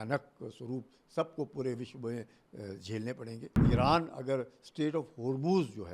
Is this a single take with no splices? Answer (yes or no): no